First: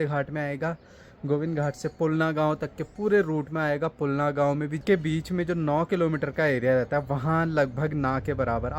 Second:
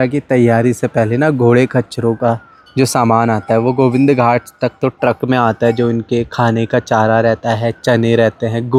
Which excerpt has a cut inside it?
first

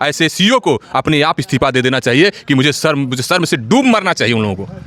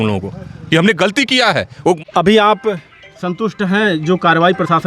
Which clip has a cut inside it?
second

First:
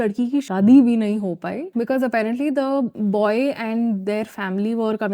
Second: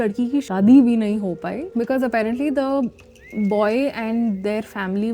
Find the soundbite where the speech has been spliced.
first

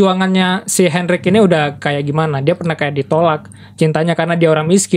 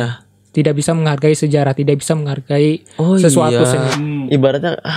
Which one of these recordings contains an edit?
second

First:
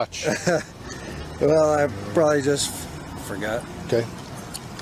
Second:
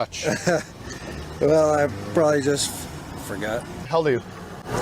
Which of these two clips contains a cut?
second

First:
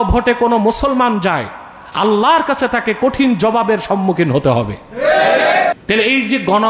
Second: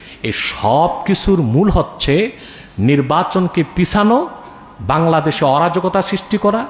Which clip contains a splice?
first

